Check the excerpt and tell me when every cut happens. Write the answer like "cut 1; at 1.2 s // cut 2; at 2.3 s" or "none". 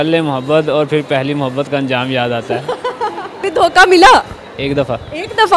cut 1; at 3.4 s